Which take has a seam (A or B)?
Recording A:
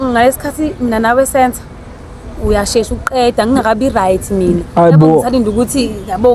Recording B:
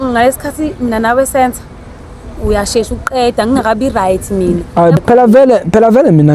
B